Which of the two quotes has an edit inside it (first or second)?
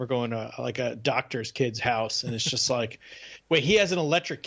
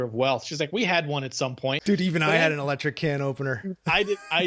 second